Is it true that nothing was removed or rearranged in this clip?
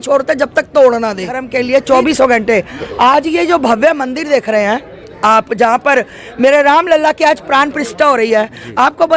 no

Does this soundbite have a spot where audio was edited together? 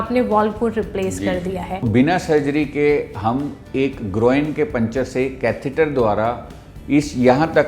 yes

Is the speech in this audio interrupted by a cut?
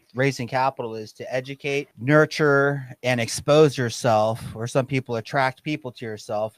yes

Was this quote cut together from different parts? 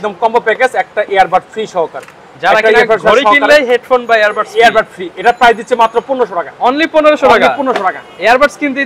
no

